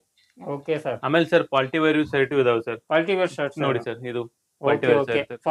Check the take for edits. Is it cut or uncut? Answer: uncut